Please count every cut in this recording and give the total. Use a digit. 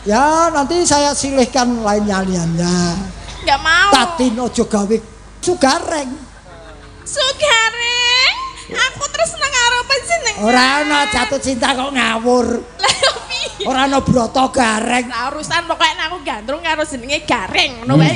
1